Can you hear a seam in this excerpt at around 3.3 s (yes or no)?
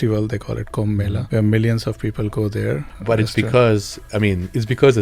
yes